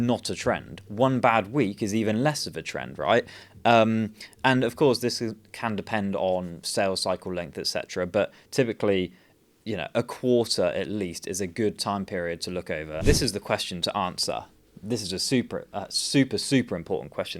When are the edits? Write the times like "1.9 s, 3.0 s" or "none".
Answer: 13.0 s